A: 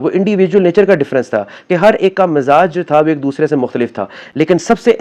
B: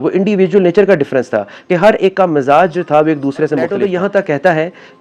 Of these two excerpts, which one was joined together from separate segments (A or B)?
B